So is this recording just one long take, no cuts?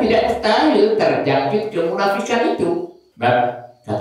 no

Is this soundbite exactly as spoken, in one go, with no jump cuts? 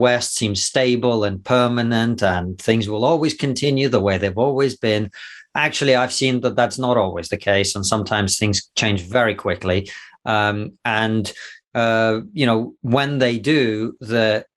yes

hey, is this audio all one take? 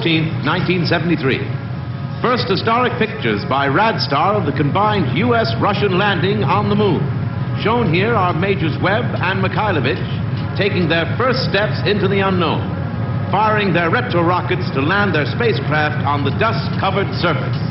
yes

